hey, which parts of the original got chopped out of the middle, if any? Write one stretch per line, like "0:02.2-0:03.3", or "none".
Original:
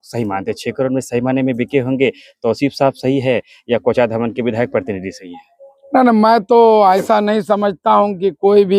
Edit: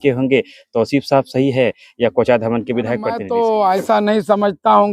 0:04.9-0:06.4